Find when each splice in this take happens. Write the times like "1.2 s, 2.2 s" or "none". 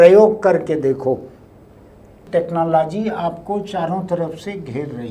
2.1 s